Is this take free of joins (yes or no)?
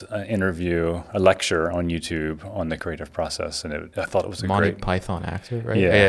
no